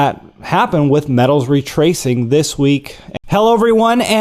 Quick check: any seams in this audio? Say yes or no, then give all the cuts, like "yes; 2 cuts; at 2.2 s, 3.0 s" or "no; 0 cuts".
no; 0 cuts